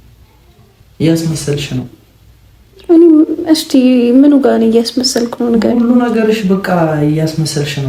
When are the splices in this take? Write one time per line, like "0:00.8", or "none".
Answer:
none